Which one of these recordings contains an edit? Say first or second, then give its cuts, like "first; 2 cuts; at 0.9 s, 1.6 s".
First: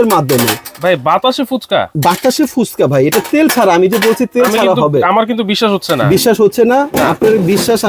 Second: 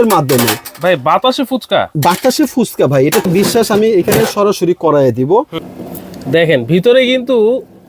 second; 2 cuts; at 3.3 s, 5.6 s